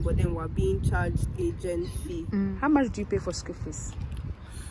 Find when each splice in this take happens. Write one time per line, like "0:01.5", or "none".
0:02.3